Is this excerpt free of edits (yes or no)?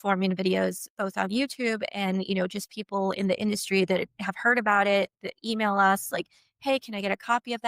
yes